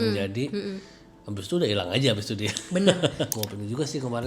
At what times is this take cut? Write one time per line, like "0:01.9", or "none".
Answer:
0:03.3